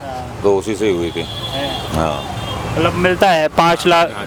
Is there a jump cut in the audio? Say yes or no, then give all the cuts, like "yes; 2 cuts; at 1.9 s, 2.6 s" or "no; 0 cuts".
no; 0 cuts